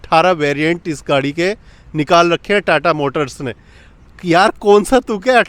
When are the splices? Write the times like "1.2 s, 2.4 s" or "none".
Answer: none